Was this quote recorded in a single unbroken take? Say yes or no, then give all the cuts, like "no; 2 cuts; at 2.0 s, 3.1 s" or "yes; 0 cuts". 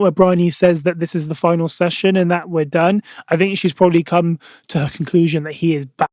yes; 0 cuts